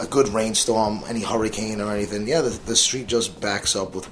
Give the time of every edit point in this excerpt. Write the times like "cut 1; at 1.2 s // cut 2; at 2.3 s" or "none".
none